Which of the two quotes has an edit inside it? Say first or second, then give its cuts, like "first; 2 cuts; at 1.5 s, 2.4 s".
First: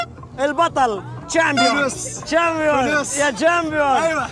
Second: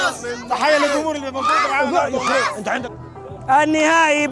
second; 1 cut; at 2.8 s